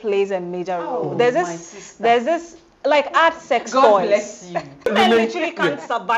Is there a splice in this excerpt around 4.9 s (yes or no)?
yes